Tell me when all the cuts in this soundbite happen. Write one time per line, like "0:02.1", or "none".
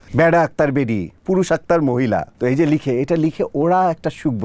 0:01.2
0:02.3